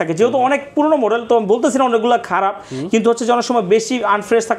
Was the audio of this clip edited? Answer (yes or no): no